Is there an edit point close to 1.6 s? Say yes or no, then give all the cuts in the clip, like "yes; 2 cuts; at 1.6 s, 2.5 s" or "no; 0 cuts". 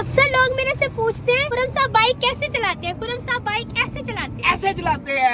yes; 1 cut; at 1.6 s